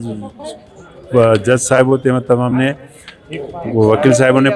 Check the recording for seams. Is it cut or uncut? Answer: uncut